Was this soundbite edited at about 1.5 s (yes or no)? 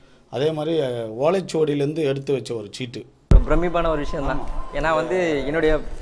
no